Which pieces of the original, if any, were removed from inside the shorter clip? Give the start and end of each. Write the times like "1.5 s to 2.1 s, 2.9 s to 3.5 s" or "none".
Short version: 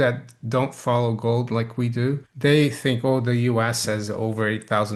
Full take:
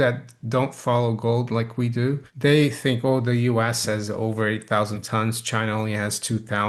none